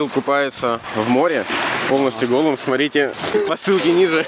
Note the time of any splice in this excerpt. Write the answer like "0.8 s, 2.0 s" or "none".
3.3 s